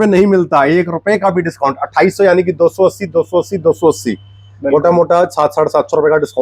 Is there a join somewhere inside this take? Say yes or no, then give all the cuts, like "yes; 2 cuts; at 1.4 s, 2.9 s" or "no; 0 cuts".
no; 0 cuts